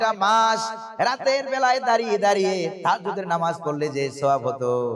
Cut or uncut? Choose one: uncut